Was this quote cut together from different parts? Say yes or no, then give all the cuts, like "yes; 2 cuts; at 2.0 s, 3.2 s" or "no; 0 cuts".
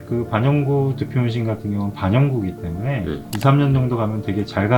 yes; 1 cut; at 3.3 s